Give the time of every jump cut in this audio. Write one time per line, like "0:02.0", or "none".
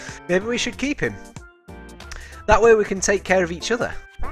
none